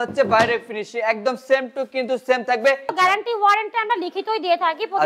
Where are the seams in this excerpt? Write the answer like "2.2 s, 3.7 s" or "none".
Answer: 2.9 s